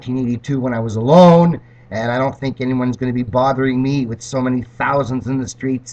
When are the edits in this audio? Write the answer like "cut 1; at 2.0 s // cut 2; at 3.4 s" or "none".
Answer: none